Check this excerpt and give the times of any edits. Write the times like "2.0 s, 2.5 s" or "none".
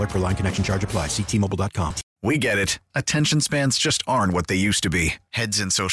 2.1 s